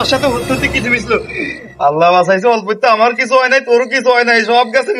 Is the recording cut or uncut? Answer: uncut